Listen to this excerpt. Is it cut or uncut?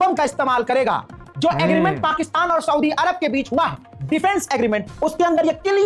uncut